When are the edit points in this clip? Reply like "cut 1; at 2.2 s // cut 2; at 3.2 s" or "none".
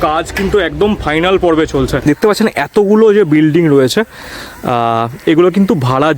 cut 1; at 2.0 s